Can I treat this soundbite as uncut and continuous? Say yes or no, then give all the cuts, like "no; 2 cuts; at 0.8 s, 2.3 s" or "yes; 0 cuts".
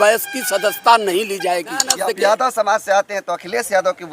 no; 1 cut; at 2.0 s